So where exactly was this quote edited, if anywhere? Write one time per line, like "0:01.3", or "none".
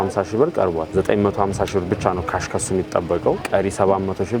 0:00.9
0:03.4